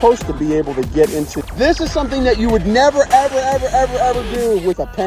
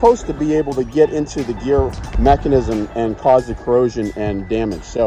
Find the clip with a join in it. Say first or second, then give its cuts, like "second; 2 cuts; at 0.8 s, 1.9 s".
first; 1 cut; at 1.4 s